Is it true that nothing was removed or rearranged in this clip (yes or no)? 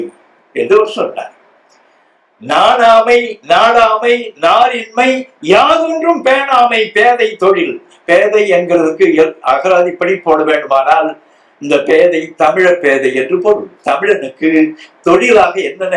yes